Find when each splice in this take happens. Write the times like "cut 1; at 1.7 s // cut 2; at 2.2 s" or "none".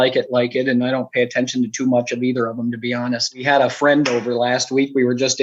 cut 1; at 3.4 s